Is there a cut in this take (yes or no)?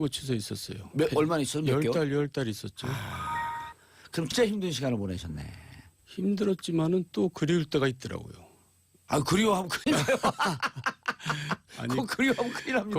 yes